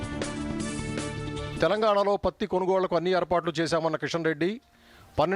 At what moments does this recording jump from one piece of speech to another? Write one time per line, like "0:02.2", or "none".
0:01.3